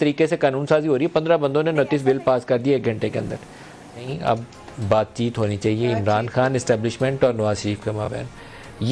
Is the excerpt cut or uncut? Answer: uncut